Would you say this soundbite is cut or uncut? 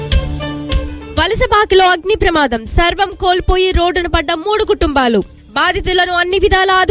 cut